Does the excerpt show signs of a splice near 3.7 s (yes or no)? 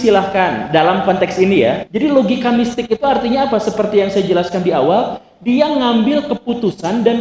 no